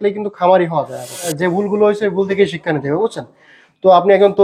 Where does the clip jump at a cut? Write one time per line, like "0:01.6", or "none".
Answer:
0:01.3